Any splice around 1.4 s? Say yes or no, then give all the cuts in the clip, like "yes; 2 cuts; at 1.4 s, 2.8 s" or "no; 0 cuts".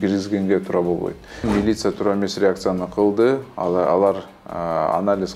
yes; 1 cut; at 1.4 s